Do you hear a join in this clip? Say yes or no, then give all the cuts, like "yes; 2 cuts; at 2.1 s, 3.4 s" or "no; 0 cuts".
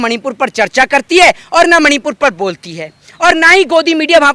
no; 0 cuts